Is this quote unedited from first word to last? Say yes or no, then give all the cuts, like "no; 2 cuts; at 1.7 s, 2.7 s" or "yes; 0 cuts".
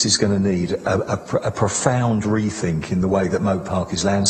yes; 0 cuts